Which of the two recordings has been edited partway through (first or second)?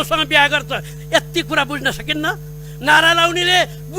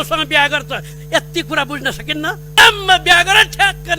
second